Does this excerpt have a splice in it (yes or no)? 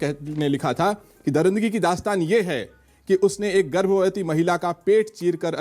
no